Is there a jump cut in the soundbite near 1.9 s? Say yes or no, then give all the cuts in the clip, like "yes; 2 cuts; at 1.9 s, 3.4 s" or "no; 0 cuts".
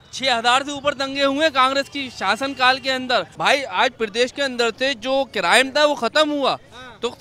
no; 1 cut; at 3.3 s